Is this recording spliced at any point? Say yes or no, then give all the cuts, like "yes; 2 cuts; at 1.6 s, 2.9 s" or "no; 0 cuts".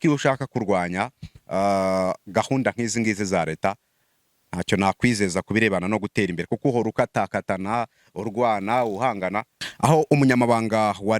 yes; 1 cut; at 9.6 s